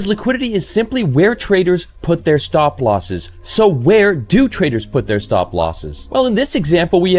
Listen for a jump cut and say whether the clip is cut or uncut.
uncut